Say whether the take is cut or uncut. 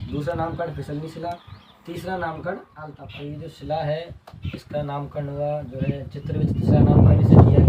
uncut